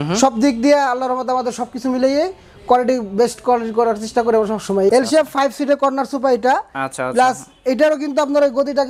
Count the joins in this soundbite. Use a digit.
1